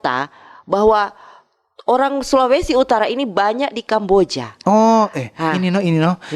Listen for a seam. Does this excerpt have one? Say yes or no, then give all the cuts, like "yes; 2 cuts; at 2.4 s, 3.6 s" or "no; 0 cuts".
no; 0 cuts